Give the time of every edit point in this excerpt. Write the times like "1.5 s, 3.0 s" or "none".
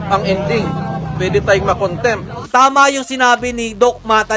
2.4 s